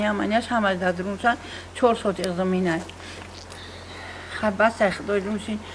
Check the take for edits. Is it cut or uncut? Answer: uncut